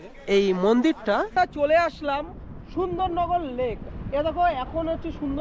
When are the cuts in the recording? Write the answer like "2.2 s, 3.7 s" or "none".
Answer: 1.3 s